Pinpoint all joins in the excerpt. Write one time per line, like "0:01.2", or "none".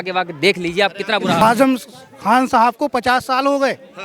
0:01.4